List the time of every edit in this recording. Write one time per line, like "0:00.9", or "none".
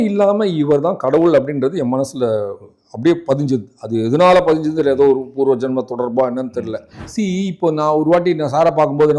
0:07.0